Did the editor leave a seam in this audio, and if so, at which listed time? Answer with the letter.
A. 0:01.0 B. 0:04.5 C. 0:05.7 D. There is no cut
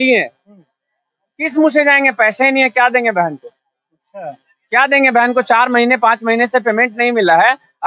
D